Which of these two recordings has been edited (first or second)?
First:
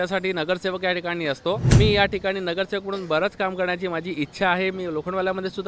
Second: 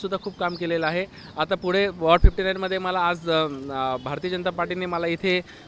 first